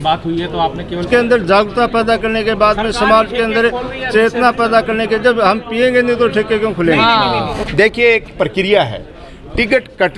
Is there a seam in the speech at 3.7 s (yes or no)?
no